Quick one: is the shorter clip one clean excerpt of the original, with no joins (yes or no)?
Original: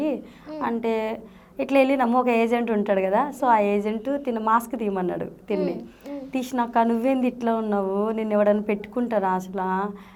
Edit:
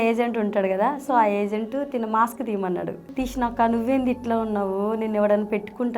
no